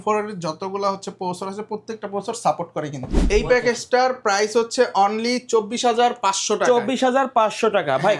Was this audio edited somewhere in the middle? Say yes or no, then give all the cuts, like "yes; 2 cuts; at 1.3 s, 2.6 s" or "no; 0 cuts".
yes; 1 cut; at 3.1 s